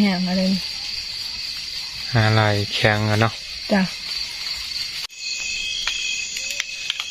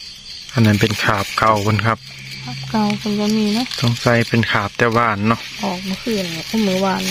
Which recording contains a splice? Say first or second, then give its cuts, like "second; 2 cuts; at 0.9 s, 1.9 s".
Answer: first; 1 cut; at 5.1 s